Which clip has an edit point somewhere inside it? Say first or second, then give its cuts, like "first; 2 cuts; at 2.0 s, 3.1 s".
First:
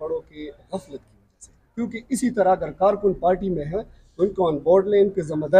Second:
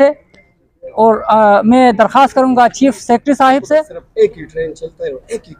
second; 1 cut; at 4.0 s